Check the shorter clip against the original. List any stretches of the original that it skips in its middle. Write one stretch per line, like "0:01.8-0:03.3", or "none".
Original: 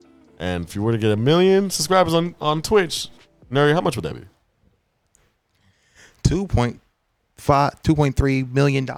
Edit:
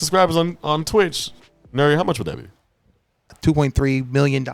0:05.1-0:07.8

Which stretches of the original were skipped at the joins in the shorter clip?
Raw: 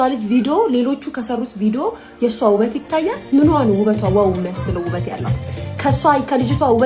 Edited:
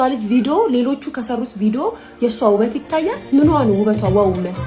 none

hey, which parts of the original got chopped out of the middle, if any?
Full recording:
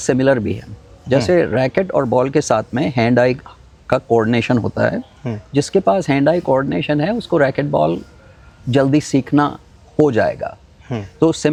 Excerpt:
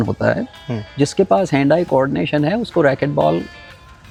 none

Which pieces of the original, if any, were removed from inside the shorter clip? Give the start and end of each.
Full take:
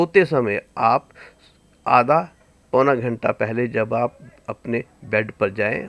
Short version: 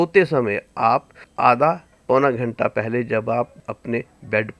0:01.2-0:01.7
0:02.4-0:02.6
0:04.3-0:04.5

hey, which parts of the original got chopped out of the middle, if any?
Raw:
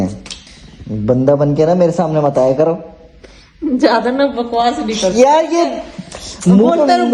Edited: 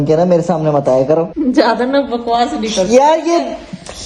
0:02.8-0:03.6

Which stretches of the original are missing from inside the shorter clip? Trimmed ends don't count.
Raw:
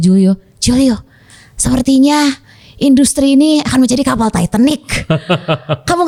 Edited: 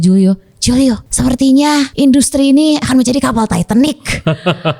0:01.1-0:01.5
0:02.4-0:02.7

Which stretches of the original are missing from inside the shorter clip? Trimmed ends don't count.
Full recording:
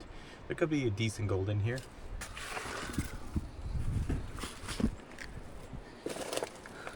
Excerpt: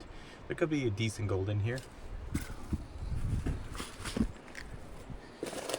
0:02.3-0:02.9

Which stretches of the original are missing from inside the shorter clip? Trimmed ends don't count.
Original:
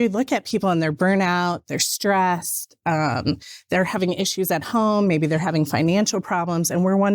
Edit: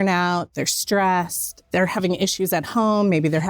0:02.7-0:03.5

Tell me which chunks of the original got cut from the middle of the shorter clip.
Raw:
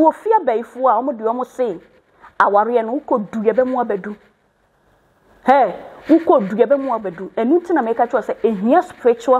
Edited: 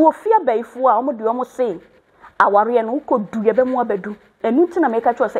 0:04.3-0:07.2

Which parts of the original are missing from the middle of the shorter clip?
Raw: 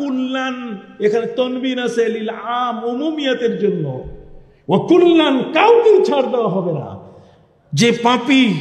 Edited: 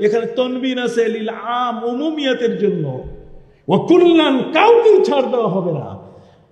none

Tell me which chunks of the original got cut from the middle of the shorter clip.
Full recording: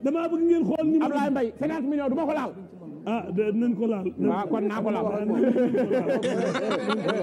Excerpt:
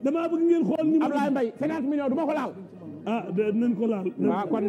none

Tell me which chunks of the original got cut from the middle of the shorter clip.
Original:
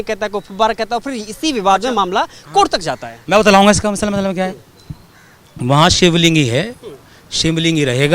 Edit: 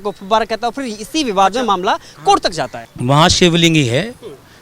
0:03.1-0:05.4

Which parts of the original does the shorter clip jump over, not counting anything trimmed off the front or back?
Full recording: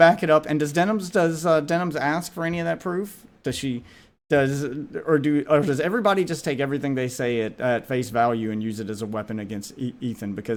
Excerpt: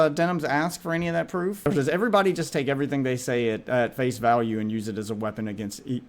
0:03.2-0:05.6

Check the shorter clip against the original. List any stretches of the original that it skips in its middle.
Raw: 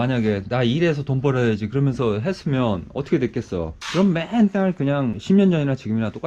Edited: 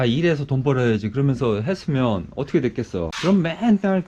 0:03.7-0:03.8

